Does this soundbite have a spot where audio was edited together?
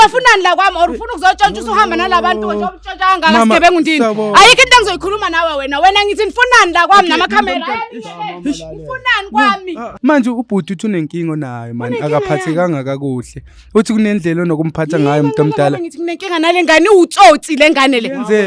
yes; 1 cut; at 9.9 s

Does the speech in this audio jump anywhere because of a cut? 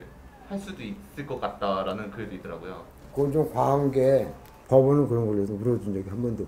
yes; 1 cut; at 4.5 s

